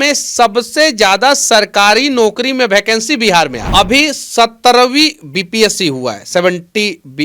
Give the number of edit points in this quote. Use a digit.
1